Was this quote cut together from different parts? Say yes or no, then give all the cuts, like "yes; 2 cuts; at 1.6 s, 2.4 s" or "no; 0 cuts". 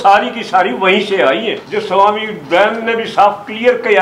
yes; 1 cut; at 1.6 s